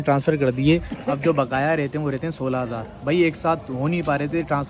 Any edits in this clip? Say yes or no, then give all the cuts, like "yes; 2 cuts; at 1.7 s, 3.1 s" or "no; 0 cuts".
no; 0 cuts